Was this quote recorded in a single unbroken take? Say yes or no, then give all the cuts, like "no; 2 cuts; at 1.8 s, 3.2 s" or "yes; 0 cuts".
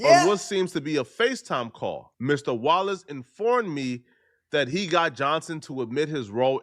no; 1 cut; at 2.1 s